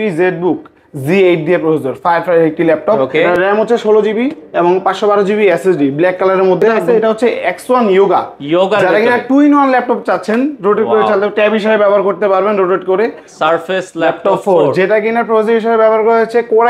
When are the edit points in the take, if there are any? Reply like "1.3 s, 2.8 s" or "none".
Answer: 3.0 s, 6.8 s, 13.3 s